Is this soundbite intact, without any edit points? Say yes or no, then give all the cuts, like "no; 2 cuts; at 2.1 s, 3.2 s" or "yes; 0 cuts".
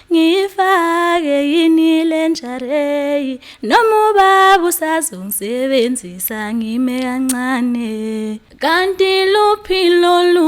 no; 1 cut; at 8.5 s